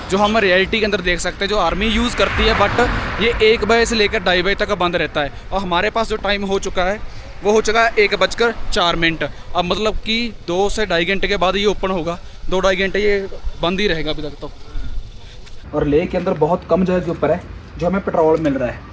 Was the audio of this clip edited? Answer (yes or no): yes